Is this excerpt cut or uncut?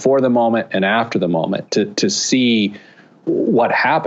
uncut